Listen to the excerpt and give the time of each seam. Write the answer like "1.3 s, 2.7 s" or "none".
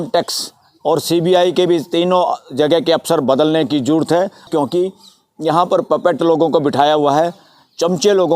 4.5 s